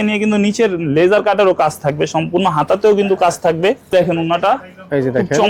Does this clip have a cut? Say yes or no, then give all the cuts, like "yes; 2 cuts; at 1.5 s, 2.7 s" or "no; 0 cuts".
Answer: yes; 1 cut; at 3.9 s